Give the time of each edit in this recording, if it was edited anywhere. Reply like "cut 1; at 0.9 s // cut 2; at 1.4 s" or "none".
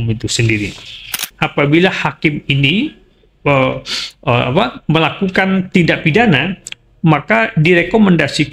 cut 1; at 1.3 s